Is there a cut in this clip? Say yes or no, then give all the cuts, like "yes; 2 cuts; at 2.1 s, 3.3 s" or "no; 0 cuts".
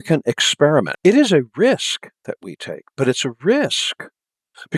yes; 1 cut; at 0.9 s